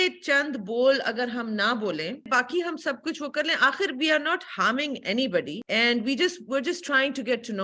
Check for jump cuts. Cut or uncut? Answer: cut